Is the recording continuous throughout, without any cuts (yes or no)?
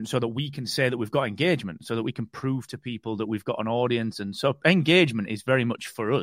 yes